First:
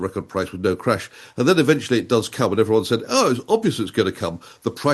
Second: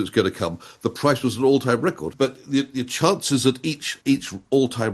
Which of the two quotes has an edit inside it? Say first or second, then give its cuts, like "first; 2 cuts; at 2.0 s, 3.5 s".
second; 2 cuts; at 2.1 s, 3.9 s